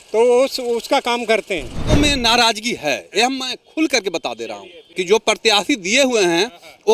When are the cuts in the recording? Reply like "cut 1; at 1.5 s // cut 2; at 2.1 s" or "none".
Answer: cut 1; at 1.7 s // cut 2; at 4.9 s